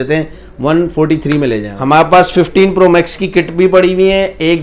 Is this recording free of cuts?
no; 1 cut; at 1.7 s

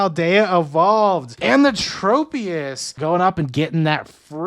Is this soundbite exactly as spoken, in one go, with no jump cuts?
no; 2 cuts; at 1.3 s, 2.8 s

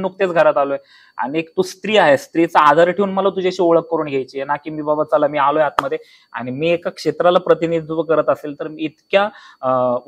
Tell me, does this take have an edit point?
no; 0 cuts

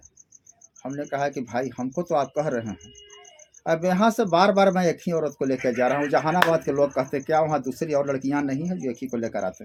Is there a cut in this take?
no; 0 cuts

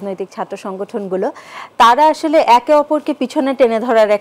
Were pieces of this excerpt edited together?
no; 0 cuts

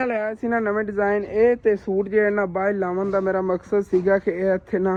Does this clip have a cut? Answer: no; 0 cuts

